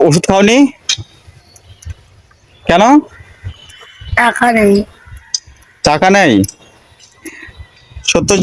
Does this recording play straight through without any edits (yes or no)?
yes